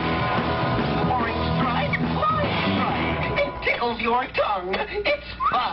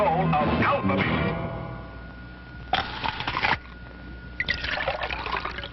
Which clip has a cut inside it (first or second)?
first